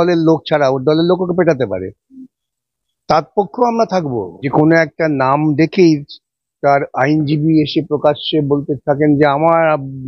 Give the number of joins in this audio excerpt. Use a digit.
1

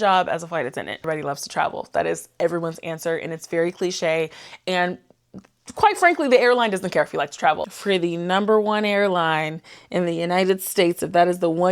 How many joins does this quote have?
2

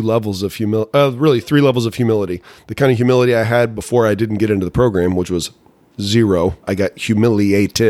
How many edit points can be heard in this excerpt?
1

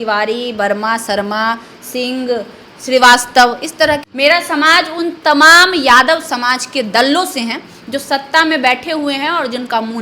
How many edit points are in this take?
1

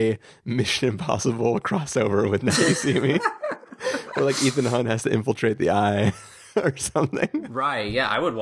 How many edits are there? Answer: 1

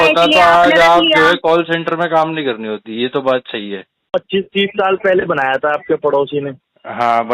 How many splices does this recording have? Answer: 1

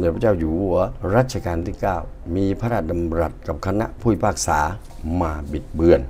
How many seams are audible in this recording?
2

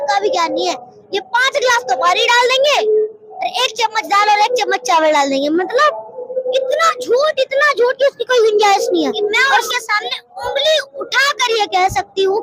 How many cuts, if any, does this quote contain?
1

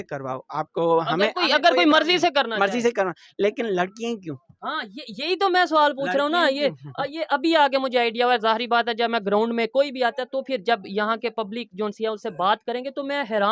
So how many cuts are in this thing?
0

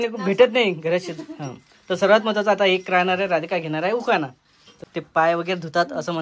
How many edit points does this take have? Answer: 1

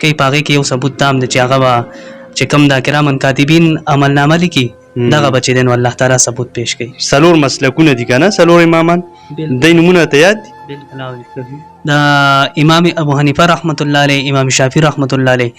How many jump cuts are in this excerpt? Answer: 1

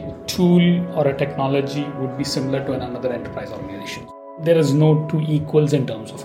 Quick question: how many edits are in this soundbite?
1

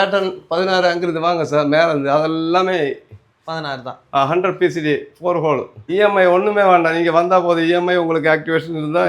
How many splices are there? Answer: 1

